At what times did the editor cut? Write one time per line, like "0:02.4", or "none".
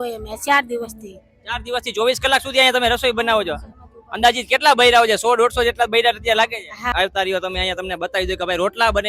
0:06.9